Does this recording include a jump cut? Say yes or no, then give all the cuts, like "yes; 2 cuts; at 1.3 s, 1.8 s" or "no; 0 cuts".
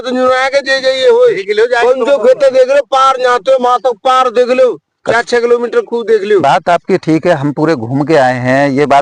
no; 0 cuts